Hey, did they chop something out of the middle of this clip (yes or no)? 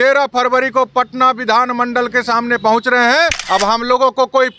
yes